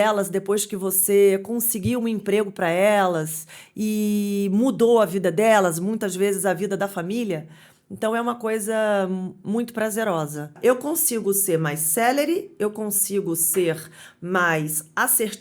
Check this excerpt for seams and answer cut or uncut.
cut